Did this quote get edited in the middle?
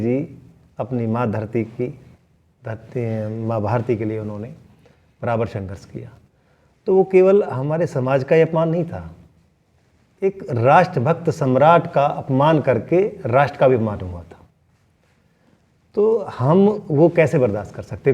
no; 0 cuts

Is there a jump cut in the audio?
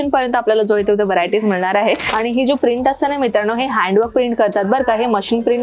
yes; 1 cut; at 2.1 s

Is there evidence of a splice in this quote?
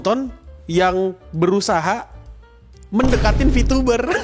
no; 0 cuts

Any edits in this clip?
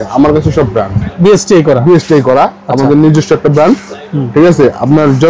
yes; 1 cut; at 1.0 s

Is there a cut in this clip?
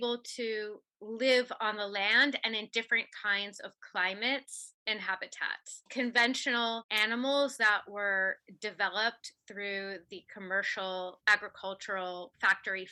no; 0 cuts

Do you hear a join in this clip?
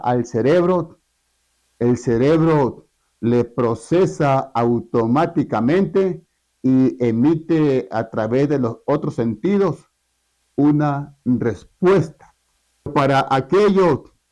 yes; 1 cut; at 12.9 s

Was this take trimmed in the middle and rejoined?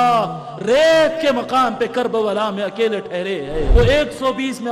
yes; 1 cut; at 3.7 s

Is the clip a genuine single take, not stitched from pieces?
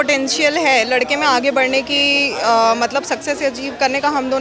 yes; 0 cuts

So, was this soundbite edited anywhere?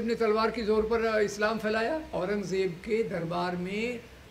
yes; 1 cut; at 2.1 s

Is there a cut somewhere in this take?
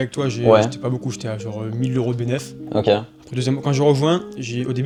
no; 0 cuts

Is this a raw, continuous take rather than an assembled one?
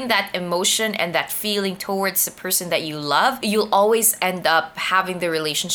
no; 1 cut; at 3.4 s

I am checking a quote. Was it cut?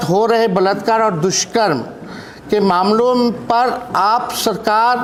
no; 0 cuts

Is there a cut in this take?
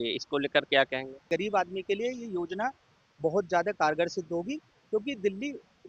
yes; 1 cut; at 1.2 s

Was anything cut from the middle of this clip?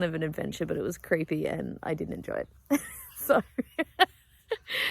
no; 0 cuts

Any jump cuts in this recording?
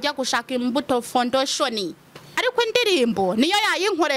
yes; 1 cut; at 2.4 s

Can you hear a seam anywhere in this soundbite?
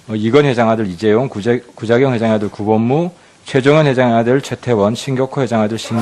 no; 0 cuts

